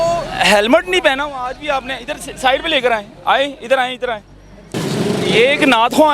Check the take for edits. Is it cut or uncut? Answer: cut